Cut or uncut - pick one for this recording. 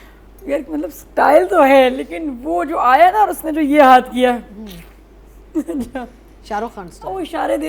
uncut